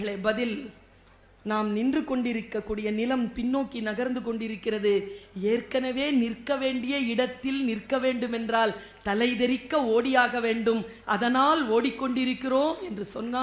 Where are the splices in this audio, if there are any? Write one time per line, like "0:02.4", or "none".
none